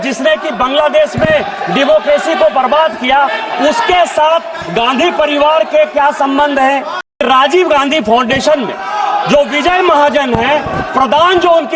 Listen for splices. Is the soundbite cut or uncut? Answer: cut